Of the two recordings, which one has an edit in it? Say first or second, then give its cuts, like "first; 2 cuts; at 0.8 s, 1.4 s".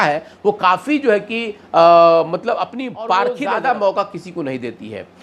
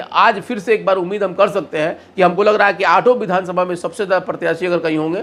first; 1 cut; at 3.4 s